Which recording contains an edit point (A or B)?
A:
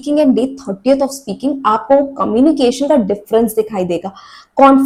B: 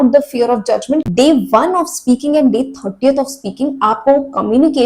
B